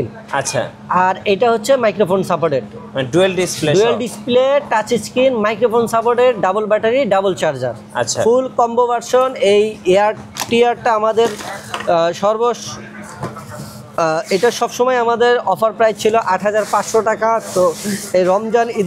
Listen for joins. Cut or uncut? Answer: uncut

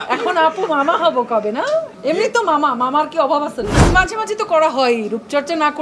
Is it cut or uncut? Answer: cut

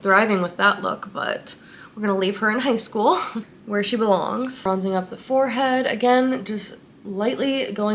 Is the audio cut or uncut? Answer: uncut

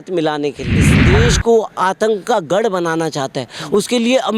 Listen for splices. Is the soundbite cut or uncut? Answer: cut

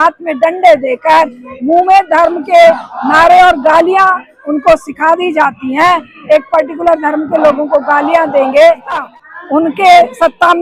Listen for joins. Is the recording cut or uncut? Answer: cut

